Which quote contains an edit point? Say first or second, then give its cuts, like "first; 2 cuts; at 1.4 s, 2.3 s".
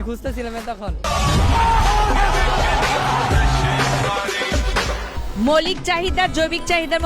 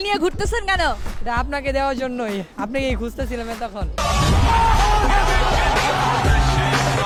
first; 1 cut; at 5.1 s